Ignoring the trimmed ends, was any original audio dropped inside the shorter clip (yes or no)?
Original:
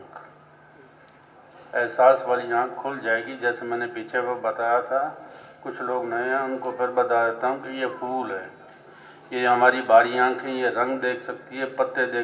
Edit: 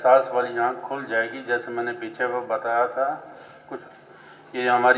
yes